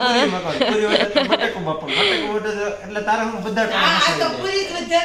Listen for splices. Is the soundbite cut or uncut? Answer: uncut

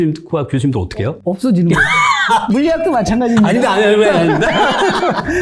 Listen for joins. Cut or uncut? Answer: uncut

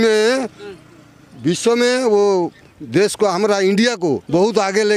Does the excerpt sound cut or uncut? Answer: uncut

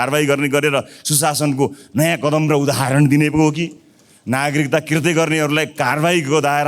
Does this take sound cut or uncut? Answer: uncut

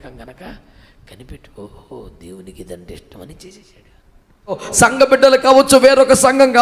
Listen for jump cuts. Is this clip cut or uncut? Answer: cut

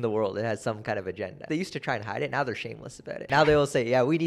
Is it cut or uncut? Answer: cut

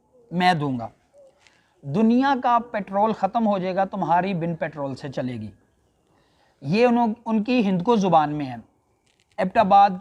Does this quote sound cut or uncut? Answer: uncut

